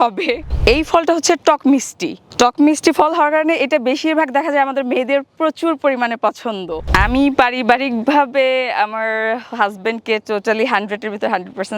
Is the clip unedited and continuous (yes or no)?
no